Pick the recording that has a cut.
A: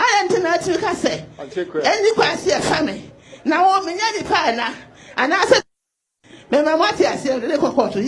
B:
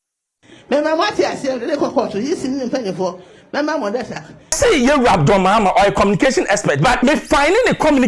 B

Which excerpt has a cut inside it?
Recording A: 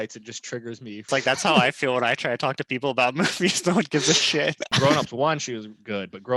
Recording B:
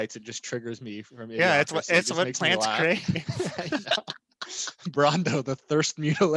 A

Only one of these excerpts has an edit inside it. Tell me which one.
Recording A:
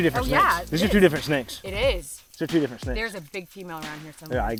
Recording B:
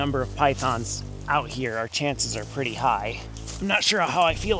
B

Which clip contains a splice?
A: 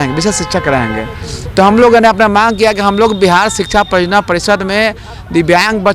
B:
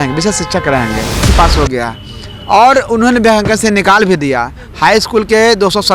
B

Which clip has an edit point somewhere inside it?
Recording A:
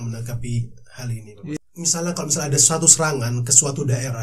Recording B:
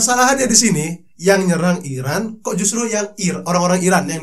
A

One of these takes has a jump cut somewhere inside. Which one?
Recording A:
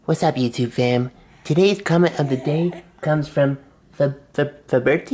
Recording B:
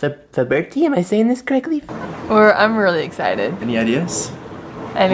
B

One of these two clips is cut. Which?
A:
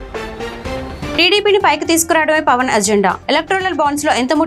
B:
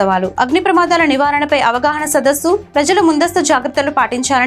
A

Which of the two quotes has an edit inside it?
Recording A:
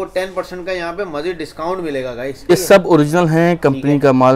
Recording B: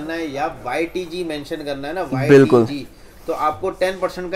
A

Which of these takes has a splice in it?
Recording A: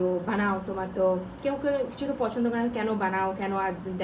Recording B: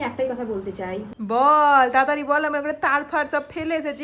B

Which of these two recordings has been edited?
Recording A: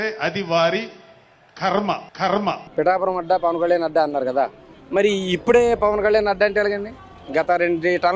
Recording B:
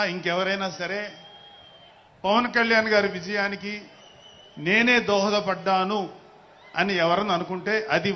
A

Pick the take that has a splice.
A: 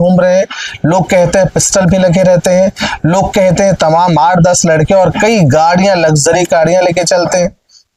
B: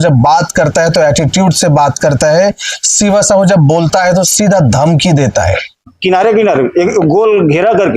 B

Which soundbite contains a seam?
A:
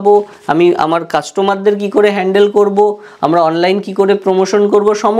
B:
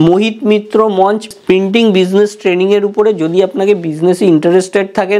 B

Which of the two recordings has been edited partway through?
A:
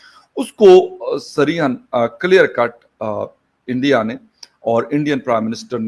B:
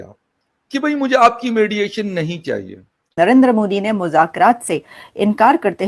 B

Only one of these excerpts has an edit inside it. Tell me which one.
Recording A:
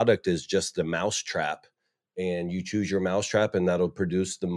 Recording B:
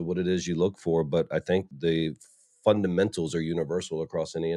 B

